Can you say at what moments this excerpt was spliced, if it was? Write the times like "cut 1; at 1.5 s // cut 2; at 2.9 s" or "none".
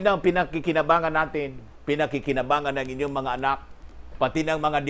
none